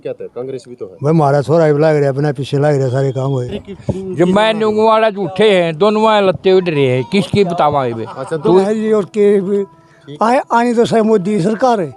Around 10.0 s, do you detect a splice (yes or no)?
no